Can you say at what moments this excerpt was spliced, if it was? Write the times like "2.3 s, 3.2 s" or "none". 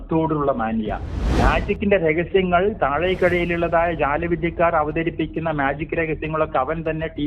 1.2 s